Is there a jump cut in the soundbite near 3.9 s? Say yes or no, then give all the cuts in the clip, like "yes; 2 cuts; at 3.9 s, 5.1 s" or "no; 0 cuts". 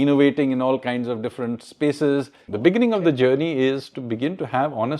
no; 1 cut; at 2.4 s